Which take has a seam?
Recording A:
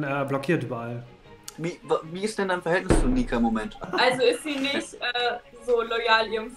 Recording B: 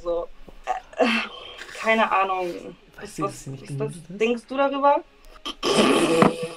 A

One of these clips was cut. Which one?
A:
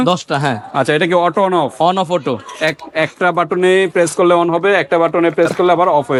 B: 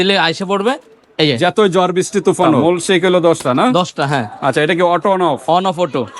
B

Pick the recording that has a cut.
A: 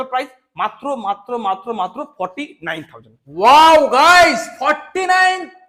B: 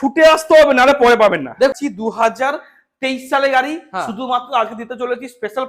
B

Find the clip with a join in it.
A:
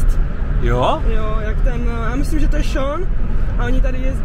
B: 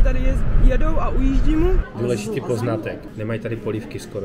B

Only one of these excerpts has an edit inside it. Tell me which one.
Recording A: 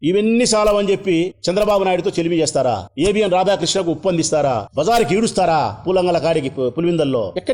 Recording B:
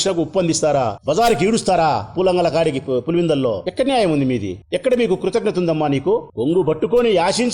B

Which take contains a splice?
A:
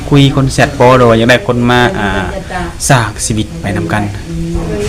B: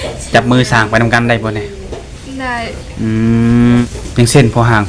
B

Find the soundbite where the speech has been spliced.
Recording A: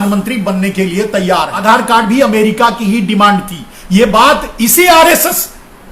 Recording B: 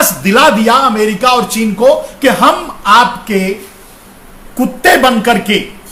A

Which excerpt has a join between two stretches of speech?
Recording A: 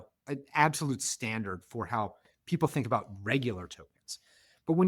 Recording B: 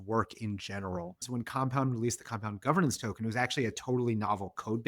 B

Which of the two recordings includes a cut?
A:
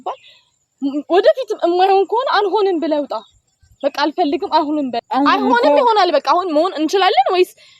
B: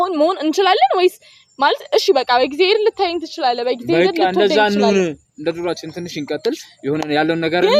A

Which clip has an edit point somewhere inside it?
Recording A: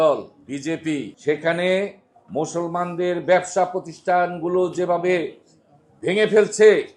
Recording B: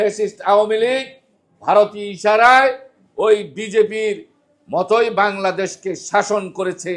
A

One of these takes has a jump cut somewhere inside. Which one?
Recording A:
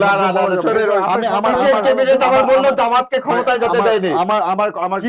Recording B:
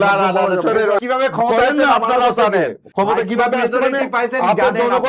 B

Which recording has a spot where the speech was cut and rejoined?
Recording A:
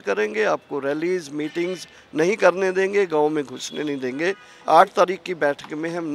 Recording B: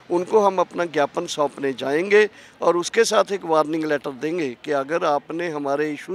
A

